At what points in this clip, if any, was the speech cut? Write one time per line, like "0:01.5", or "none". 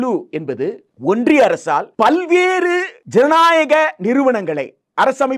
0:00.9
0:01.9
0:03.0